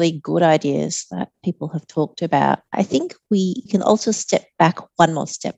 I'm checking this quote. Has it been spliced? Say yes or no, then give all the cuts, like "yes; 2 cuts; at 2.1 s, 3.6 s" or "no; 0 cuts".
yes; 1 cut; at 3.3 s